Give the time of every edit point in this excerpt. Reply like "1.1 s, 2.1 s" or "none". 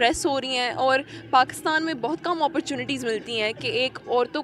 none